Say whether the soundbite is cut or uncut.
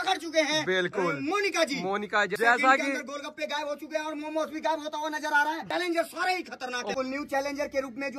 cut